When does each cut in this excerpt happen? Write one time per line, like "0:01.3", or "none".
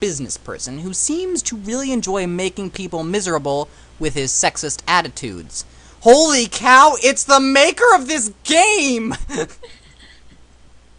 0:04.3